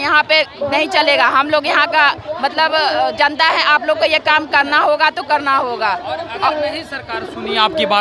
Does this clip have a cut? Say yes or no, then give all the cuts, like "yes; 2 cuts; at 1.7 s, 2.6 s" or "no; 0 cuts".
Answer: no; 0 cuts